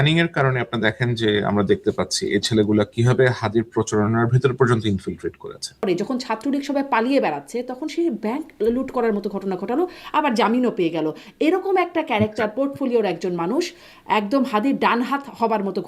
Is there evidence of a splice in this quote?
yes; 1 cut; at 5.8 s

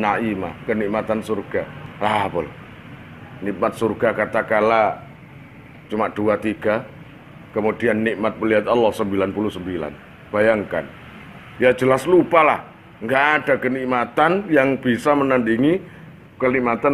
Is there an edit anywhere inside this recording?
yes; 1 cut; at 1.8 s

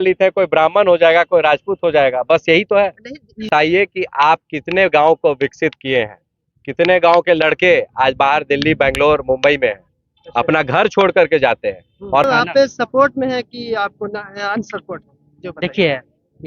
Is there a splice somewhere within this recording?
yes; 2 cuts; at 3.5 s, 12.2 s

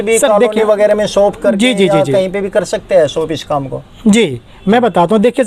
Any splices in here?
no; 0 cuts

